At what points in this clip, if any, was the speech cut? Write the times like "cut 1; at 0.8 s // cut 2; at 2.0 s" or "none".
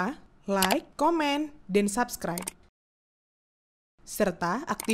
none

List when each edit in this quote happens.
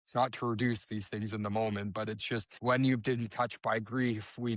cut 1; at 2.5 s

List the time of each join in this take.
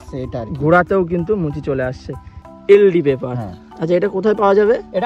cut 1; at 2.2 s

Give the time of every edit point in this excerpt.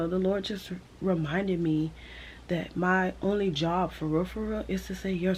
none

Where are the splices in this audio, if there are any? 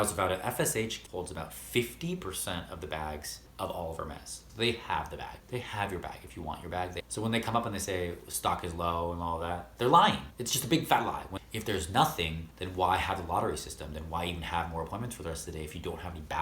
cut 1; at 1.0 s // cut 2; at 3.4 s // cut 3; at 4.4 s // cut 4; at 7.0 s // cut 5; at 11.3 s

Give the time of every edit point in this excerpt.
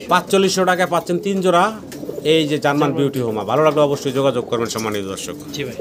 none

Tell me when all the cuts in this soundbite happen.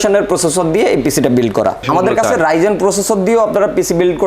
cut 1; at 1.9 s

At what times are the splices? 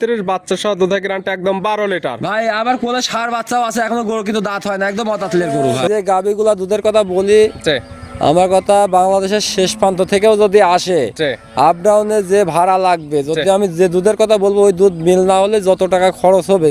cut 1; at 5.9 s

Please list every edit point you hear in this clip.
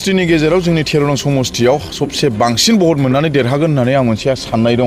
none

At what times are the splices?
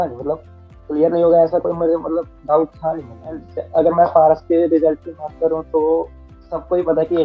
cut 1; at 3.5 s

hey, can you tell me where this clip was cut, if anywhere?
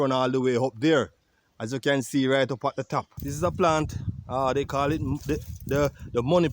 cut 1; at 3.2 s

